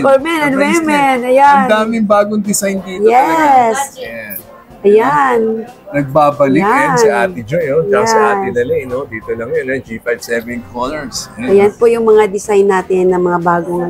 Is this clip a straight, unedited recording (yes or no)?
yes